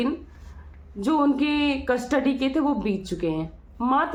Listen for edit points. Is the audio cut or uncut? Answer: uncut